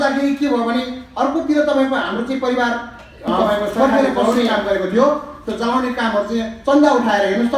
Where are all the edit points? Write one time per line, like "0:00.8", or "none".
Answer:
0:04.2